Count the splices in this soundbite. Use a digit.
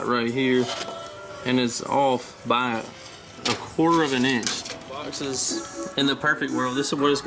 1